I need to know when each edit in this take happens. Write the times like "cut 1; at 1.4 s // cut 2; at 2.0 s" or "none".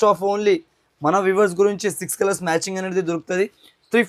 none